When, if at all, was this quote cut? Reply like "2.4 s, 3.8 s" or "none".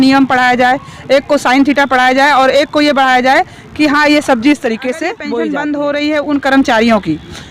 5.2 s

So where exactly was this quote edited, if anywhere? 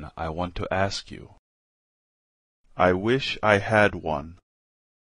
none

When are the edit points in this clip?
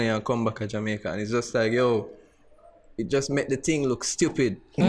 none

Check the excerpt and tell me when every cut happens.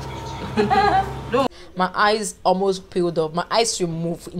1.6 s

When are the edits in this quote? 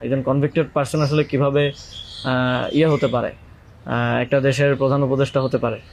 none

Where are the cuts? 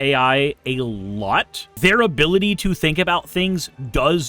1.8 s

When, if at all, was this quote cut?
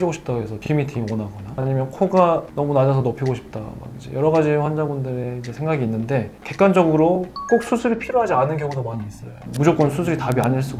9.3 s

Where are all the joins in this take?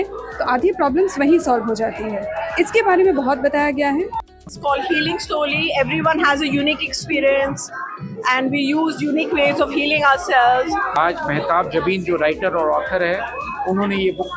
4.1 s, 10.9 s

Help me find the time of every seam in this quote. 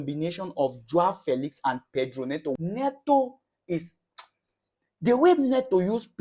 2.6 s

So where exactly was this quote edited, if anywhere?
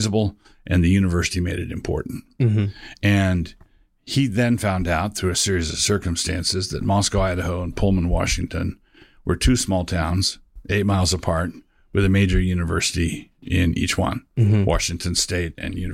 none

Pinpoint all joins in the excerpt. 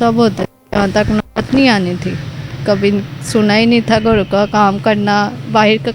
none

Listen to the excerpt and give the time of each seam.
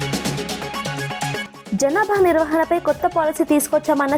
1.3 s

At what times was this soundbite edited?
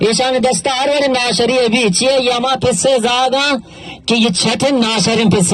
none

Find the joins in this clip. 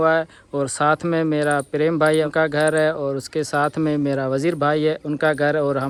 none

